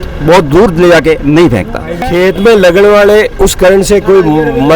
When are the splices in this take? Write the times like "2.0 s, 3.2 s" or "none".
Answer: 2.0 s